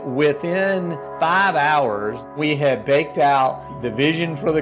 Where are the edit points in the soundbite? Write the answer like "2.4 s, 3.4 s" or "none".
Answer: 1.0 s, 2.3 s, 3.7 s